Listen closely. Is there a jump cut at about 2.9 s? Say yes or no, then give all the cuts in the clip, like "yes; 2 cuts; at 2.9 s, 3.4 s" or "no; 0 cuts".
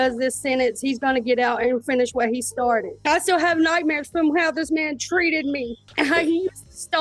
yes; 1 cut; at 2.9 s